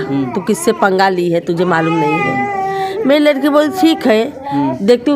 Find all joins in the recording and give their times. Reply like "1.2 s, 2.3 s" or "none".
none